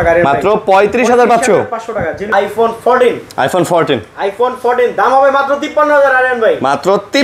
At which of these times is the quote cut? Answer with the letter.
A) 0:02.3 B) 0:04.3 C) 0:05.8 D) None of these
A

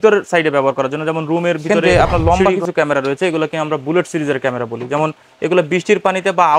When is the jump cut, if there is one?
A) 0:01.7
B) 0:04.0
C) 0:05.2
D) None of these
A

